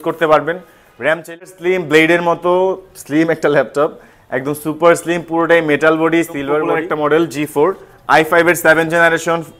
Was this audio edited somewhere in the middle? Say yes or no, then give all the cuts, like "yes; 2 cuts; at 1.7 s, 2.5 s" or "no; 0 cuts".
yes; 2 cuts; at 1.6 s, 6.7 s